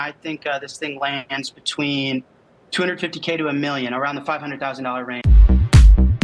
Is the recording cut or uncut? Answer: cut